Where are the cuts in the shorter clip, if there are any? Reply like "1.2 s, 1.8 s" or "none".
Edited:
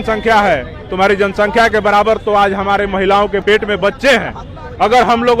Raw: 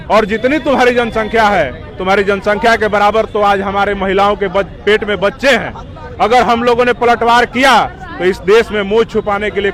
3.4 s

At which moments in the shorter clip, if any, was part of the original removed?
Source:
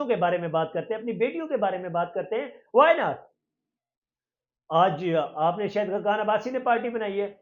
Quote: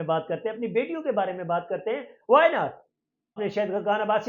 3.4 s

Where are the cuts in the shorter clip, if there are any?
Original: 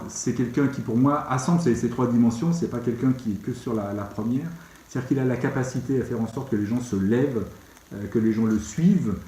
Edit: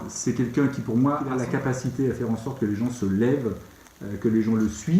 1.3 s

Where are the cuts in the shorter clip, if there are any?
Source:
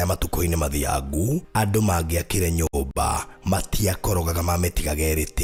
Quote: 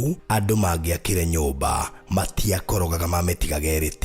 1.5 s

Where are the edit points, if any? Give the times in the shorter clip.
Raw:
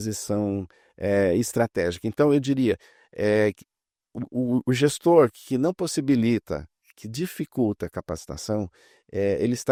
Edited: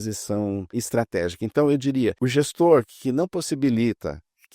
0.8 s, 2.2 s

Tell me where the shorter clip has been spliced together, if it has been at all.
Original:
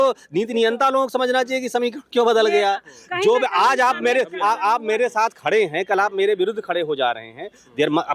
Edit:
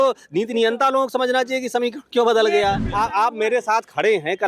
2.9 s

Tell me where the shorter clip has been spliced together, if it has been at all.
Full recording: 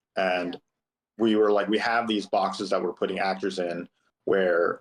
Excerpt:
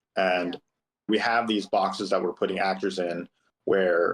1.1 s

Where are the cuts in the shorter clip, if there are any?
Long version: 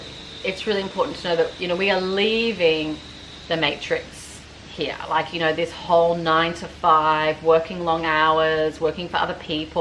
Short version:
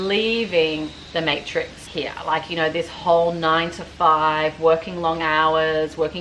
1.0 s, 1.8 s

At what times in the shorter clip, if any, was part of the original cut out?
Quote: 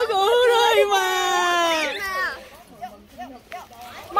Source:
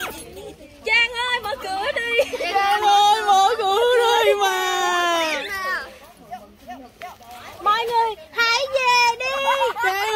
none

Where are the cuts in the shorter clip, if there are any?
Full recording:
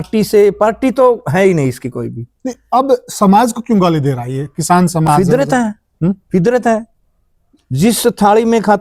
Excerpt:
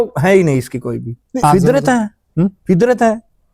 1.4 s

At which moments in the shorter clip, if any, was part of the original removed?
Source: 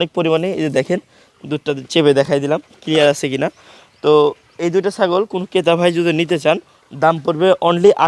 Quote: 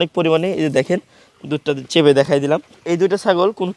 2.7 s

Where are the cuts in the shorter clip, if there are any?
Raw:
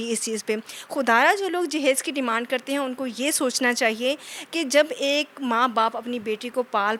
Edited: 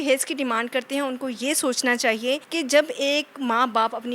2.5 s

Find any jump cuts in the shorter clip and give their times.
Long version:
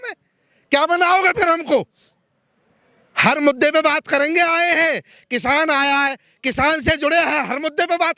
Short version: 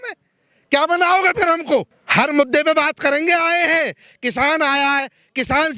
2.0 s

